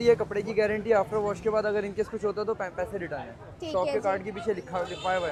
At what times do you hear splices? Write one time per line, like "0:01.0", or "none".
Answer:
none

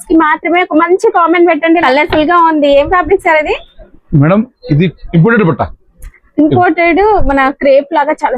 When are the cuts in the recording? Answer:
0:01.8

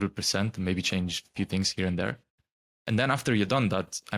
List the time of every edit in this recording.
none

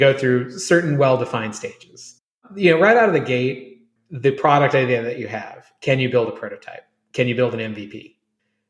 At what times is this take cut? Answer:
none

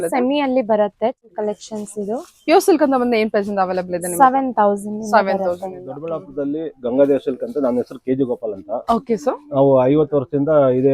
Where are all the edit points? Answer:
0:01.3
0:06.2

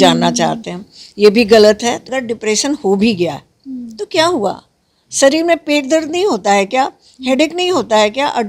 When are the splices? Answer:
0:02.1

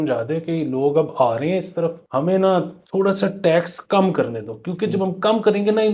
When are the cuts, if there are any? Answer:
0:02.0
0:02.8

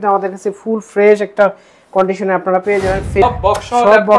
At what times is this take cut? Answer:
0:03.2

